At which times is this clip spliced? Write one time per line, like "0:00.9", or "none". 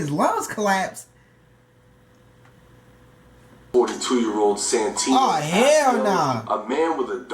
0:03.7